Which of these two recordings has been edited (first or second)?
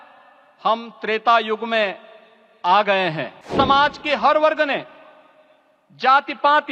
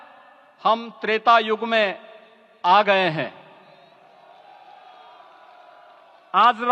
first